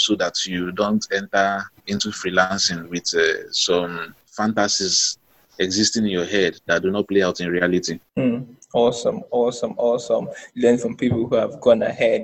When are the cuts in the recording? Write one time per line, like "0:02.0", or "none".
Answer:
none